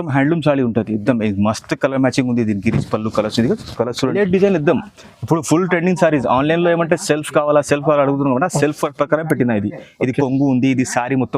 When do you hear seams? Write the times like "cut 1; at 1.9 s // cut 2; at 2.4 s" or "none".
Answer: cut 1; at 4.1 s